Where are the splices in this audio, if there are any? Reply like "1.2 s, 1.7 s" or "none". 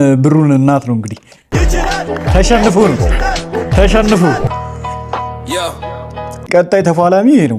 4.5 s